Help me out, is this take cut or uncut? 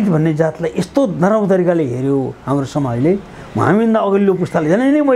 uncut